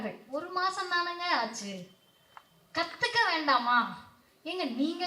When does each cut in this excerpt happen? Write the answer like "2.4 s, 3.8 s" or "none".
none